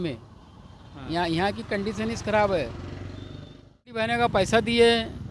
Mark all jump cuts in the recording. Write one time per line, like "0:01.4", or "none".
0:04.0